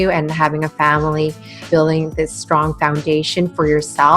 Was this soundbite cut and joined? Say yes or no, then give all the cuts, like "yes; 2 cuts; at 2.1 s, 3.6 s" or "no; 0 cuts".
yes; 1 cut; at 1.6 s